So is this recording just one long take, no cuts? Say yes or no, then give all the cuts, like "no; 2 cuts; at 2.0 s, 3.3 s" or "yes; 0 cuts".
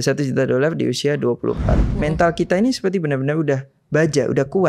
no; 1 cut; at 1.9 s